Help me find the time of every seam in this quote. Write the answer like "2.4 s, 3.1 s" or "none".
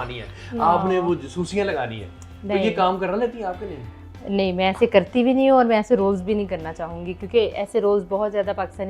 none